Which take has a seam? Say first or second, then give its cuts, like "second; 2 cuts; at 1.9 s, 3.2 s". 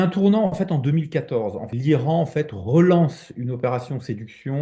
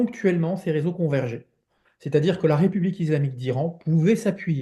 first; 1 cut; at 1.6 s